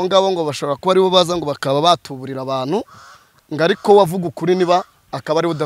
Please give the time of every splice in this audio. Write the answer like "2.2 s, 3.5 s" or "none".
none